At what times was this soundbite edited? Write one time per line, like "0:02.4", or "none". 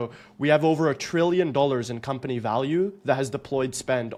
none